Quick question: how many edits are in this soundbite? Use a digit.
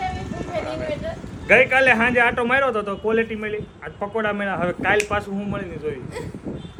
0